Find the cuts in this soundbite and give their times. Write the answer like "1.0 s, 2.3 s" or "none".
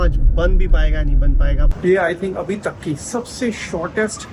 1.7 s

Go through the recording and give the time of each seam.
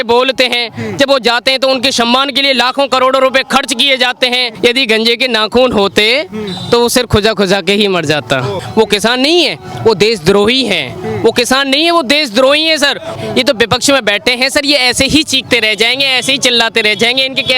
4.5 s, 8.6 s, 13.1 s

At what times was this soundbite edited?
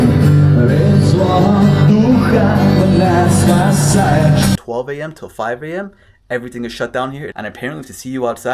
4.6 s, 7.3 s

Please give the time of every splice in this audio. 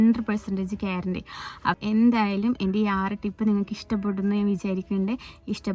1.8 s

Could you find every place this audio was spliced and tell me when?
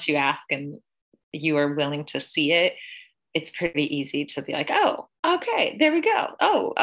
3.7 s

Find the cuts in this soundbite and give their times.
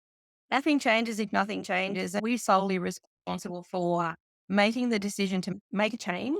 2.2 s, 5.5 s

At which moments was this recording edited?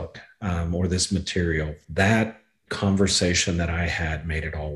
1.8 s

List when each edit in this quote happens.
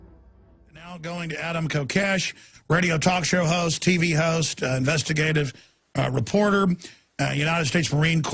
1.9 s

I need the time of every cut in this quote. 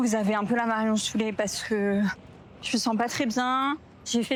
none

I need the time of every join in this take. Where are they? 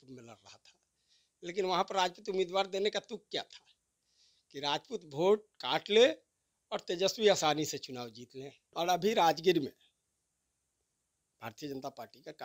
8.6 s

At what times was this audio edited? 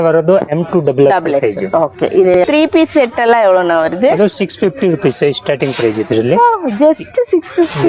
2.4 s

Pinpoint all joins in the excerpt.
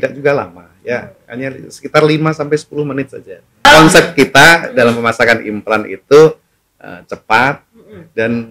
3.6 s

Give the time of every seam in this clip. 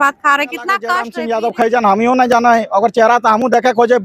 1.1 s

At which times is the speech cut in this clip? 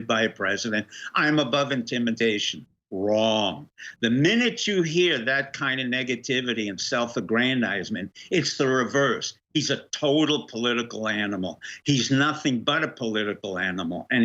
none

